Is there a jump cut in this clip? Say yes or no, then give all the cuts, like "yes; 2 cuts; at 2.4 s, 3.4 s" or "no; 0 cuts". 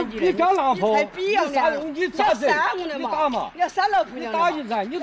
no; 0 cuts